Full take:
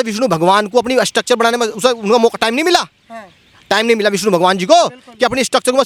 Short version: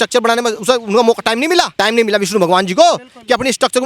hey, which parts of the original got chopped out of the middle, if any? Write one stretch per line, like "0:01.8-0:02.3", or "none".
0:02.9-0:03.6